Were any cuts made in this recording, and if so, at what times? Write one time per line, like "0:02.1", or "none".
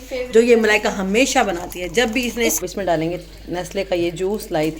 0:02.7